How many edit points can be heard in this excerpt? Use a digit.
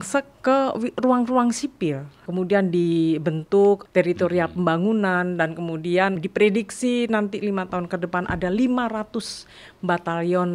3